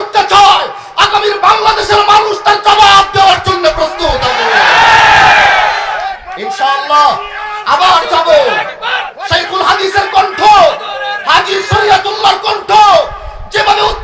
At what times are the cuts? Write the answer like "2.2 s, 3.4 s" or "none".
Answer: none